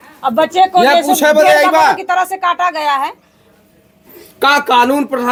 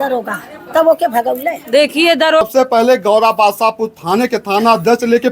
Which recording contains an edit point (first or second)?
second